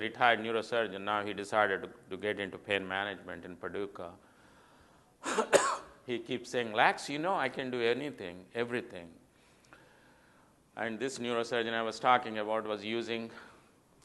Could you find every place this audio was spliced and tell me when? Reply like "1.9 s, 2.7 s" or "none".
9.1 s